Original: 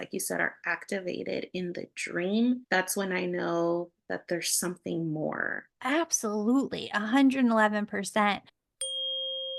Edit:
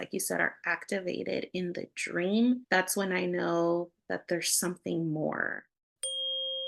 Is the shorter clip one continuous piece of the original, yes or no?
no